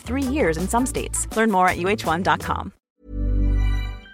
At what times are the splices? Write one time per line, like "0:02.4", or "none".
0:02.8